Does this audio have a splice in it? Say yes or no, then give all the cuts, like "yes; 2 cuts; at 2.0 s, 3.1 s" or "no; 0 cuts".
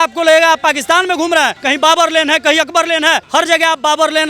yes; 2 cuts; at 1.6 s, 3.2 s